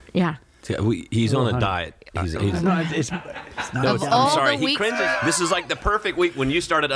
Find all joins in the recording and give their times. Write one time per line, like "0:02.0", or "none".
0:05.0